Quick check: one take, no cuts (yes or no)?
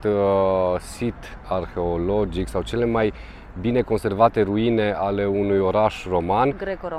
yes